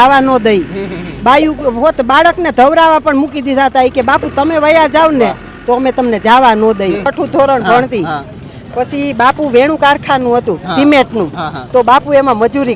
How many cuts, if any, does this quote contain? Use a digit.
1